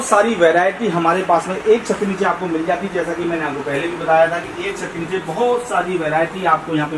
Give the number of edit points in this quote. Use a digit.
0